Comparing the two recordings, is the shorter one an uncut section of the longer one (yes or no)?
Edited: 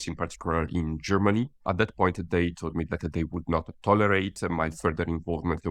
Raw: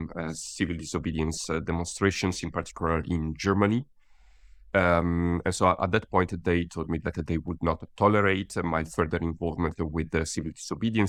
no